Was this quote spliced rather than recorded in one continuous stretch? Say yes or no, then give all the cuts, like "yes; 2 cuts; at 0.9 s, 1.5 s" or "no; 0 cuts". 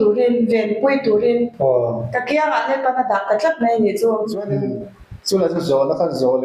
yes; 1 cut; at 4.5 s